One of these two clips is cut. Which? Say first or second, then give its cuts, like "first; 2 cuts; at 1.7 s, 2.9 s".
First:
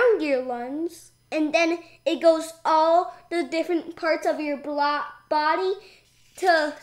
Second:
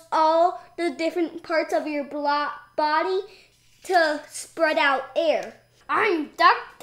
second; 1 cut; at 5.6 s